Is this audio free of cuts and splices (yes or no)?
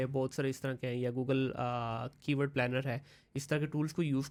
yes